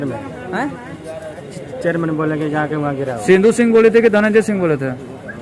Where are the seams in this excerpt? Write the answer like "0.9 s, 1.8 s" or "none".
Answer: none